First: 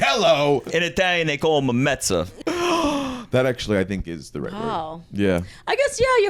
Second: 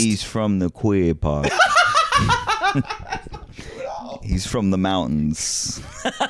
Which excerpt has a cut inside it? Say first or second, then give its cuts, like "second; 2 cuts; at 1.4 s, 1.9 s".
first; 1 cut; at 2.4 s